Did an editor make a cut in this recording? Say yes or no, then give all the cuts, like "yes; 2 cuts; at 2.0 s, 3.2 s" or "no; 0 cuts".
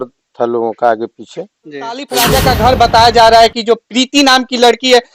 yes; 1 cut; at 2.1 s